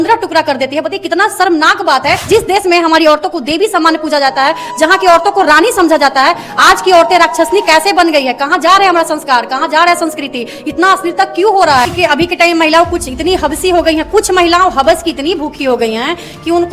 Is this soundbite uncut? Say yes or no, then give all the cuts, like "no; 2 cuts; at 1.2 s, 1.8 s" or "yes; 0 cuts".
no; 2 cuts; at 2.3 s, 11.9 s